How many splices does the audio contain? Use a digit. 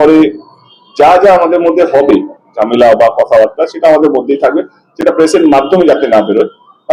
0